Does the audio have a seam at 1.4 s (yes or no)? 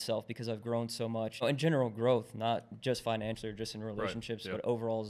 yes